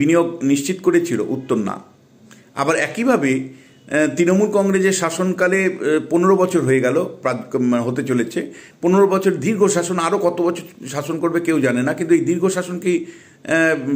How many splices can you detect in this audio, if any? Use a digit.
0